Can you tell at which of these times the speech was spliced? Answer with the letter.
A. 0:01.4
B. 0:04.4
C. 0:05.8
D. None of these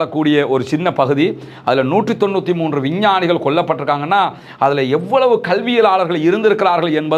D